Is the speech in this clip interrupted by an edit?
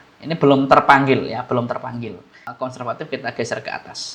yes; 1 cut; at 2.5 s

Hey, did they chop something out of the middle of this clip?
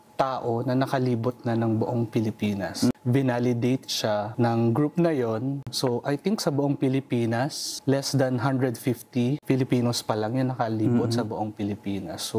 yes; 5 cuts; at 2.9 s, 4.3 s, 5.7 s, 7.7 s, 9.4 s

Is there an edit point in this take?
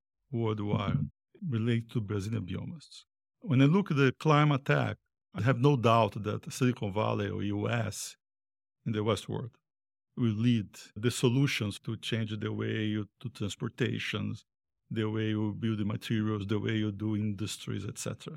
yes; 2 cuts; at 1.3 s, 2.1 s

